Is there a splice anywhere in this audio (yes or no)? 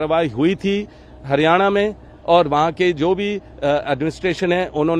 no